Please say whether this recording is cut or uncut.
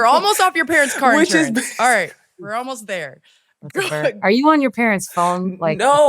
uncut